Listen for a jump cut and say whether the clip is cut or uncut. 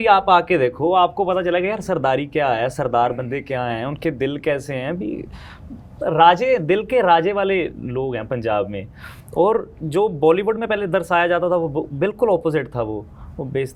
uncut